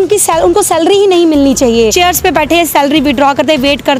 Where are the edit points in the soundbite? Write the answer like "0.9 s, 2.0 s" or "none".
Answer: 1.9 s